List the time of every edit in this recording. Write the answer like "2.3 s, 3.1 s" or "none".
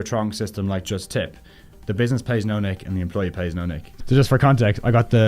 3.9 s